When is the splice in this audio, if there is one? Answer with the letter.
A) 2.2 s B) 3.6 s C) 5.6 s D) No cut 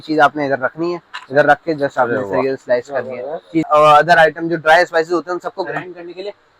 B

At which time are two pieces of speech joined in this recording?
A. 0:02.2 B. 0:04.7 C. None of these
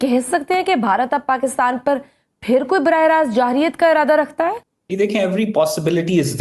B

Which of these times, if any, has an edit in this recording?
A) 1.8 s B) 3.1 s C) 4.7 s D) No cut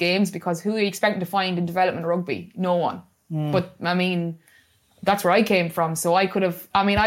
D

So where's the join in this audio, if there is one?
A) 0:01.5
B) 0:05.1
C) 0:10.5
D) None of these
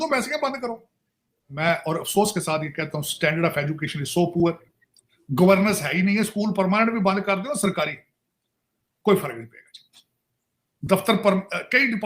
A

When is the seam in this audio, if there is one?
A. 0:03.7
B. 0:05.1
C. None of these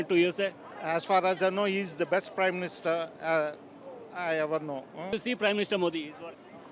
B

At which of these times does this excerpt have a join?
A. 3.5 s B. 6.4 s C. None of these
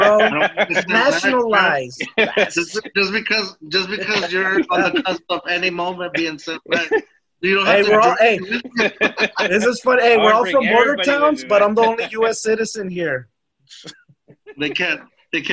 C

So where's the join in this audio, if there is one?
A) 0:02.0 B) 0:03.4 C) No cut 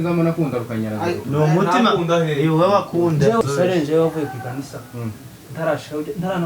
B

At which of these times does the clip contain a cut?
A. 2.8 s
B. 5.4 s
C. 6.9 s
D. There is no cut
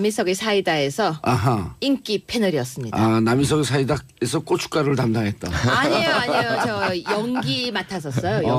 D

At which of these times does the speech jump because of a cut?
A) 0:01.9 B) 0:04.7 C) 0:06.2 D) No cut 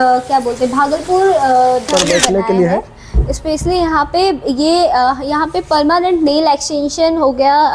A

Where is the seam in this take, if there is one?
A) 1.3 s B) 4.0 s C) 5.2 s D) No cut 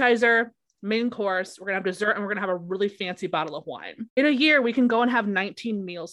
B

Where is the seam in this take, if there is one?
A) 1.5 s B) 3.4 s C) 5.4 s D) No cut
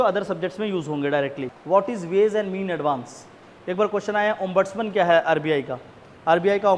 A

